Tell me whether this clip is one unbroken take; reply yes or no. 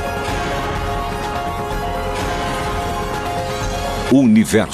no